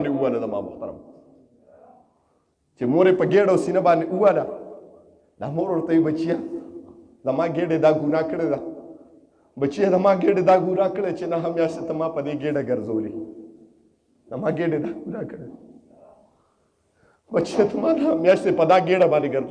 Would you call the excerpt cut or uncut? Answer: uncut